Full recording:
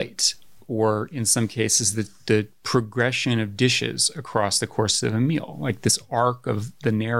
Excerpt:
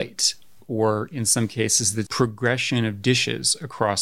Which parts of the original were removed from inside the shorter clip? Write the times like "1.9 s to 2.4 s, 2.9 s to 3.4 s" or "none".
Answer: 2.0 s to 2.6 s